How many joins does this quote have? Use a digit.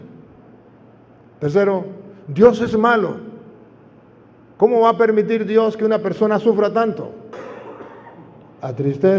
1